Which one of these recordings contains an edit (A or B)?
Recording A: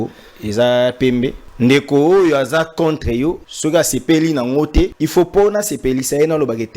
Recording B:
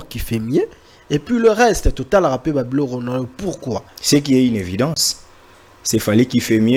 A